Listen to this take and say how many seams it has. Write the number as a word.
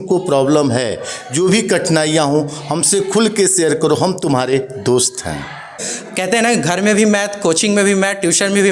one